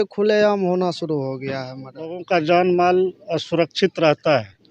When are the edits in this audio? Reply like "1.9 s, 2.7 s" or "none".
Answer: 2.2 s

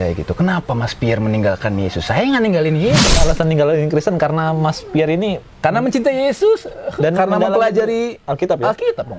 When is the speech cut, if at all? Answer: 3.2 s

